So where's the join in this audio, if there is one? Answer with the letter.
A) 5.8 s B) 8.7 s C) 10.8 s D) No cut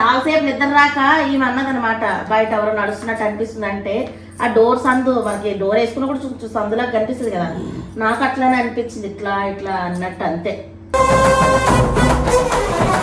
D